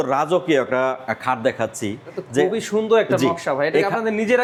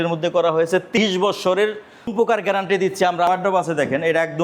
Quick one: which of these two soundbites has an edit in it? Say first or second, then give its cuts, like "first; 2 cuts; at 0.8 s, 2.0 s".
second; 3 cuts; at 1.0 s, 2.1 s, 3.3 s